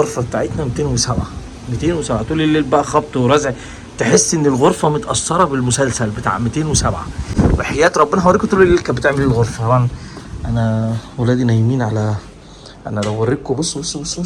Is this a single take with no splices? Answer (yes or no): yes